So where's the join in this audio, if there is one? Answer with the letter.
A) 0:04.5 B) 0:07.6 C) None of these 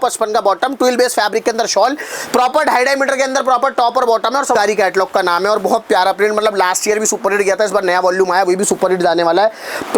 A